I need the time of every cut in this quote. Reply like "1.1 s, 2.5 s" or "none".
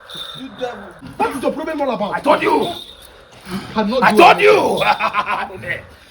1.1 s